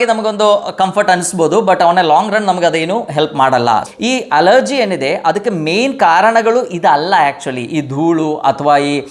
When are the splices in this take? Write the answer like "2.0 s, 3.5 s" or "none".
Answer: 3.9 s